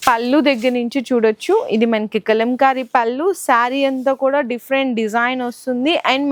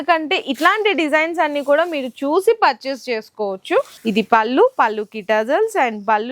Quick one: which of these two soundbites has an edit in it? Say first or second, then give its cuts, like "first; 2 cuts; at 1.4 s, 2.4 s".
second; 1 cut; at 3.9 s